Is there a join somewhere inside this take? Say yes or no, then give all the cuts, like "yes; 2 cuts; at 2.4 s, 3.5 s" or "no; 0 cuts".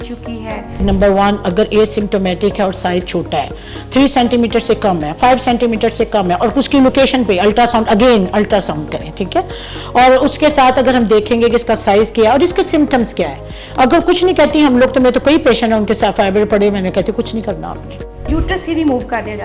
yes; 2 cuts; at 0.8 s, 18.3 s